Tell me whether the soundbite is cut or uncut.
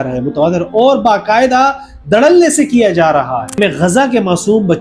cut